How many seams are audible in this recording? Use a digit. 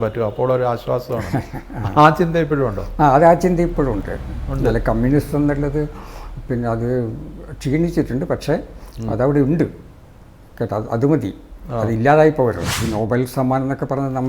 1